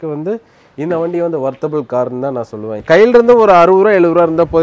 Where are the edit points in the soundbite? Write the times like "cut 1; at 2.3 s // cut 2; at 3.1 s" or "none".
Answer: cut 1; at 2.8 s